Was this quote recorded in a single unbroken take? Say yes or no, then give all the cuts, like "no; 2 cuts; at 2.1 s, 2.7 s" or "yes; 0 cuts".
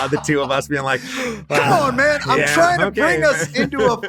yes; 0 cuts